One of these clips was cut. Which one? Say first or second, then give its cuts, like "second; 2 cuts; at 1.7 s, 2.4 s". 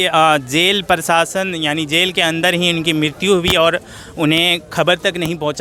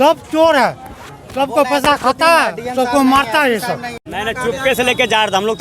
second; 1 cut; at 4.0 s